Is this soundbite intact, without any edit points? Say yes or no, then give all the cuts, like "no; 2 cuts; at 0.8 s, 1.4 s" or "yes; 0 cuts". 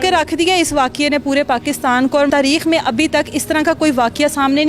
no; 1 cut; at 2.3 s